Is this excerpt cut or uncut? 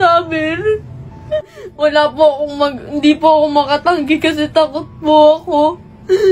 cut